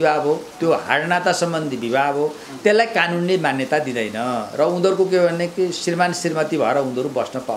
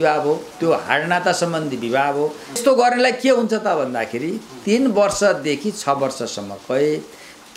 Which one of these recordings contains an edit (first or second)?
second